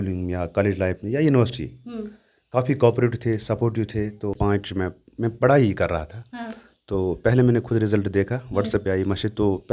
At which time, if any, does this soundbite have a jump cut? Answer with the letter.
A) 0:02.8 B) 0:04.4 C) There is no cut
B